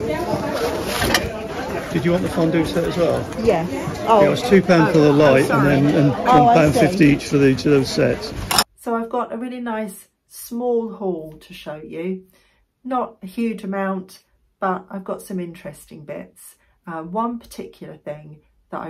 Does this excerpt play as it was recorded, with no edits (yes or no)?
no